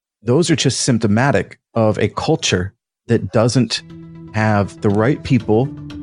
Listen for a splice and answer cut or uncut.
uncut